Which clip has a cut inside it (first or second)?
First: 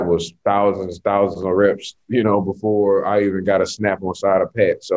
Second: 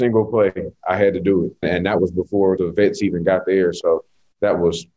second